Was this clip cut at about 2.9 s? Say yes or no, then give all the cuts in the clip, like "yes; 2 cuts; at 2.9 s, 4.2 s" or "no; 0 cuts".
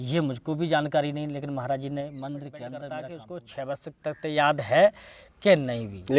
yes; 1 cut; at 2.9 s